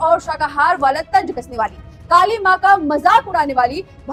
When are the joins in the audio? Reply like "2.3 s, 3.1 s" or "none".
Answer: none